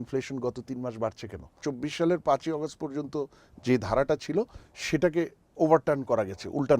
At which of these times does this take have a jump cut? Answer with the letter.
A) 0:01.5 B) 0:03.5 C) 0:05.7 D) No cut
A